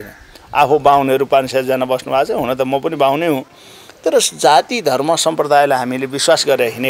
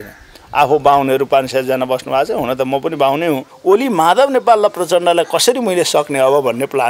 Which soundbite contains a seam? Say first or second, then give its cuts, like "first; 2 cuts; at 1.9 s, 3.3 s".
second; 1 cut; at 3.5 s